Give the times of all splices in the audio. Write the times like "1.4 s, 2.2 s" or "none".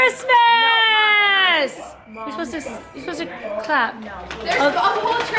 none